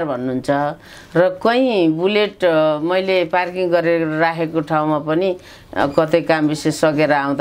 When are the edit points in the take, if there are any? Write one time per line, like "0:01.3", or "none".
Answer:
none